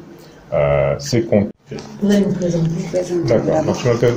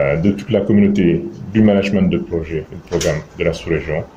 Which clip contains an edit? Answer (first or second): first